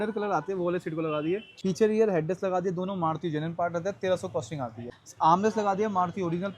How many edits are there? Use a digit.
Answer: 2